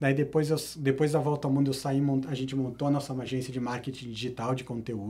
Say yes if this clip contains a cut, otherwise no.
no